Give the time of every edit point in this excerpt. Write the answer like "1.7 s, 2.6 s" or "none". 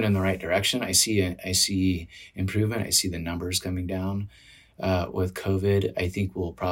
none